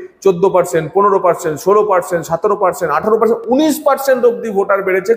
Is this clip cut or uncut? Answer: uncut